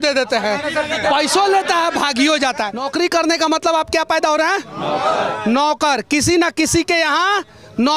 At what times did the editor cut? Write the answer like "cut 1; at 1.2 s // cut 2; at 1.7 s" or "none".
cut 1; at 2.8 s